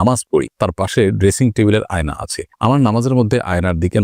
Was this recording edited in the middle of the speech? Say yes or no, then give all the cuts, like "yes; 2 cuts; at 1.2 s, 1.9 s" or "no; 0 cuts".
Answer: no; 0 cuts